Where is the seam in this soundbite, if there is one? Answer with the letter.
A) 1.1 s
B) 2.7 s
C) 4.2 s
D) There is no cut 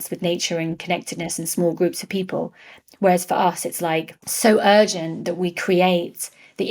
C